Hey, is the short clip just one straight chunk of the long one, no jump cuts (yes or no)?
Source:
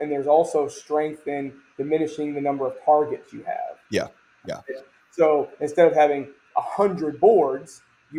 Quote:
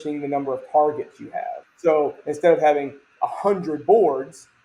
no